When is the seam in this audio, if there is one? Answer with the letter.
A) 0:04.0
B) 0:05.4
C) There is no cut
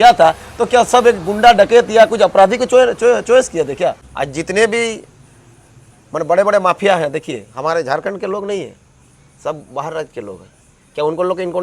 A